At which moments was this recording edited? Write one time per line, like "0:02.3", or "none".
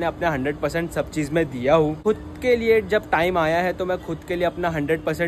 0:02.0